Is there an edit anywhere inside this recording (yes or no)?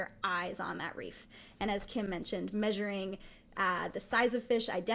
no